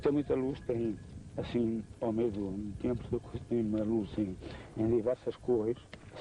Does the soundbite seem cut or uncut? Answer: cut